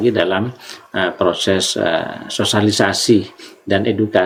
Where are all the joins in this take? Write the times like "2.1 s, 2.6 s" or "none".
none